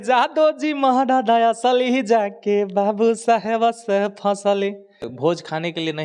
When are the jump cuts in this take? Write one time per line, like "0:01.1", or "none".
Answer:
0:05.1